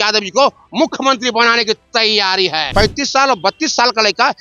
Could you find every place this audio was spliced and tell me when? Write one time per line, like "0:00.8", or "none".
0:02.7